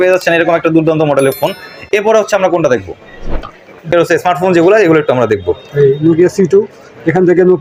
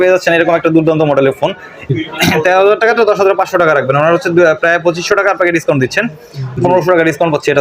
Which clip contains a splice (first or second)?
second